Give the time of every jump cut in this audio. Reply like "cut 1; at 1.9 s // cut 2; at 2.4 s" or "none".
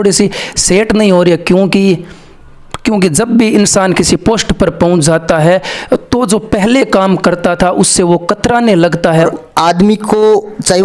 cut 1; at 9.3 s

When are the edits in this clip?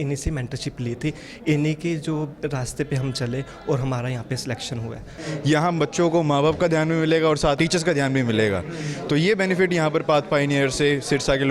cut 1; at 5.2 s // cut 2; at 7.6 s

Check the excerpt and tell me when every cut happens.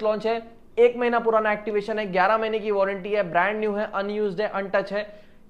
none

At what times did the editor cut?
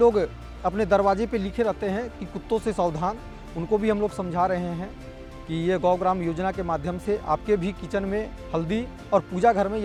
none

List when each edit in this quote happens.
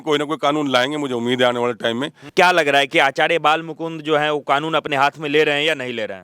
cut 1; at 2.2 s

